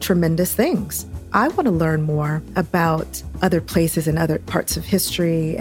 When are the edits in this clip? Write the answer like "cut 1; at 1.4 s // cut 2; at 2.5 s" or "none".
cut 1; at 1.0 s

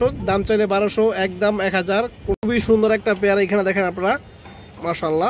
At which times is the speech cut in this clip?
cut 1; at 2.3 s

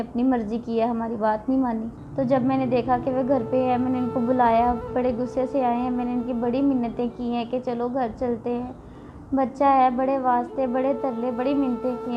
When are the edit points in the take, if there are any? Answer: cut 1; at 2.0 s

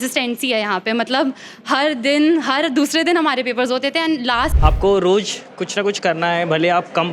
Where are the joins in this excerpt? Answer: cut 1; at 4.5 s

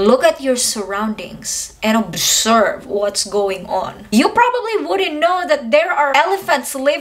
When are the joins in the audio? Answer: cut 1; at 4.0 s // cut 2; at 6.1 s

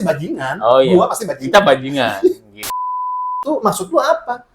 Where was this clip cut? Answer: cut 1; at 2.9 s

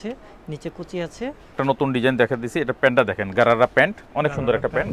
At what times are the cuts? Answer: cut 1; at 1.6 s

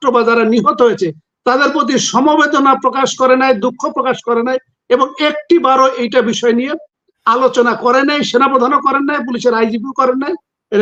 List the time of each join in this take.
none

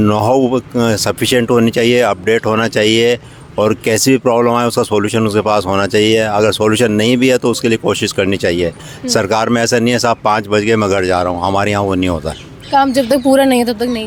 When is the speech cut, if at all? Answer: none

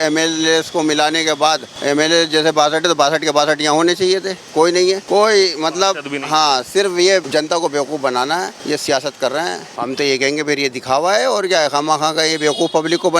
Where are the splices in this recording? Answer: cut 1; at 1.7 s // cut 2; at 5.0 s // cut 3; at 7.3 s // cut 4; at 8.6 s // cut 5; at 9.7 s

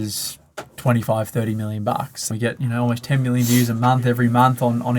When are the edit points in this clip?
cut 1; at 2.2 s

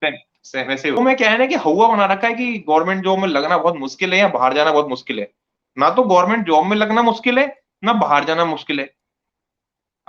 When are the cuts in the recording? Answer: cut 1; at 1.0 s

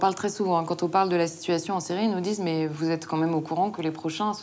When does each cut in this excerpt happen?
none

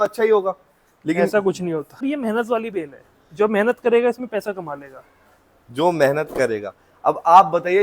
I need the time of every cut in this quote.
cut 1; at 2.0 s

